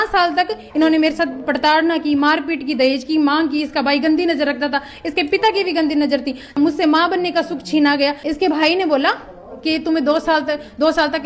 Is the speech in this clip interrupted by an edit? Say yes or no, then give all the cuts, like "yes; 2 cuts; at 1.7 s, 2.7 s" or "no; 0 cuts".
yes; 2 cuts; at 6.5 s, 8.2 s